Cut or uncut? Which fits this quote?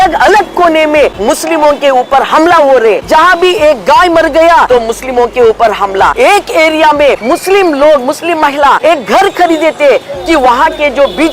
cut